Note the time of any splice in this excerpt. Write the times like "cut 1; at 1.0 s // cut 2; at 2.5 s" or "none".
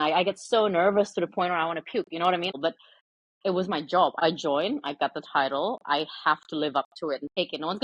cut 1; at 2.5 s // cut 2; at 4.1 s